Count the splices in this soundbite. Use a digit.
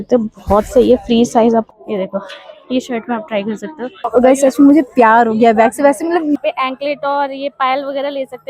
3